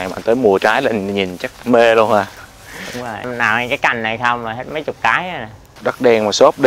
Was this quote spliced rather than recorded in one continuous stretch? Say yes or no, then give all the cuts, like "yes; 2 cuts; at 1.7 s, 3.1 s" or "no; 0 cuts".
yes; 2 cuts; at 3.2 s, 5.7 s